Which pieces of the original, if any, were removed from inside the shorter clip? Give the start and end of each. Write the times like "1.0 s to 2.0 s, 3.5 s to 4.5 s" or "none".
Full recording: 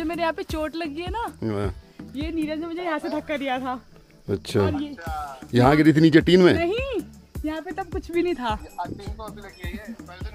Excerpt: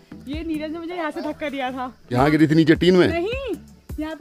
4.0 s to 5.6 s